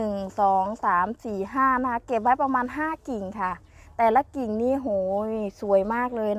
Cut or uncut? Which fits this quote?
uncut